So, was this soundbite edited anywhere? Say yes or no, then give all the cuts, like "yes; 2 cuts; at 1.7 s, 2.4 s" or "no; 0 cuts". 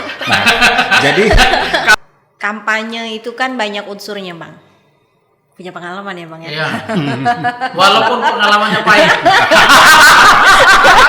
yes; 1 cut; at 1.9 s